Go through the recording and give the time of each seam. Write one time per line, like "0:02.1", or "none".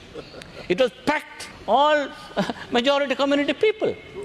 0:01.5